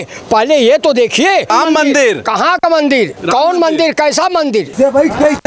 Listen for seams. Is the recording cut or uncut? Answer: cut